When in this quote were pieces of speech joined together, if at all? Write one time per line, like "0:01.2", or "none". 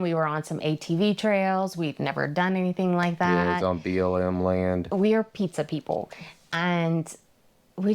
0:04.8